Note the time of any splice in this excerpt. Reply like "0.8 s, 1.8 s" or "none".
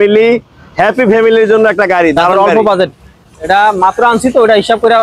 3.3 s